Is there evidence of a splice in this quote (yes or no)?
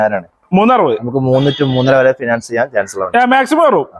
no